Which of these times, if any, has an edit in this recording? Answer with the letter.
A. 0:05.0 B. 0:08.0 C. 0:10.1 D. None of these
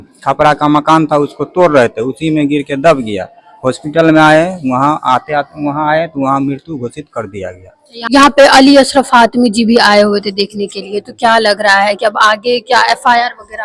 B